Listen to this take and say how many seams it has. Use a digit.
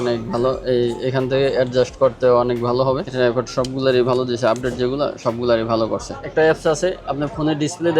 2